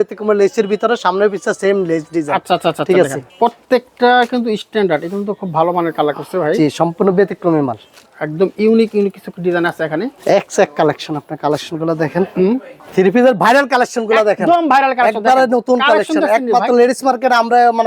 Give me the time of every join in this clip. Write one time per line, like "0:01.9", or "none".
0:03.2
0:10.1
0:12.8